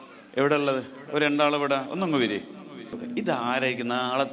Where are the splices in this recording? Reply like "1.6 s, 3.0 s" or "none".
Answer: 3.0 s